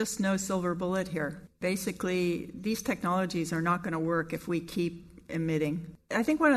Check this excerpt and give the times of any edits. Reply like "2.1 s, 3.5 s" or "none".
none